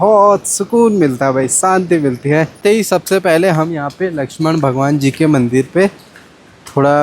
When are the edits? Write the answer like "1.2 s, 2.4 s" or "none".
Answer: 2.6 s